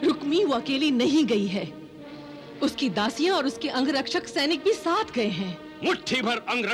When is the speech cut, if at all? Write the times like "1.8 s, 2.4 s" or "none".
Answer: none